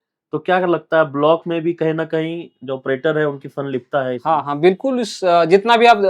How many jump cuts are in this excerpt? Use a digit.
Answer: 0